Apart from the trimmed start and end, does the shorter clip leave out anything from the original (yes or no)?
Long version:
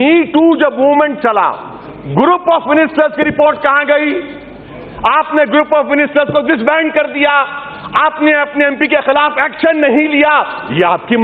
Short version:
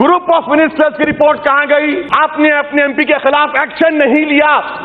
yes